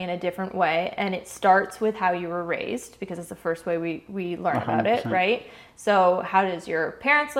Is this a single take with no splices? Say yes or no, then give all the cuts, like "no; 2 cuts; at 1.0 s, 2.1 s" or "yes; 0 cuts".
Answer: yes; 0 cuts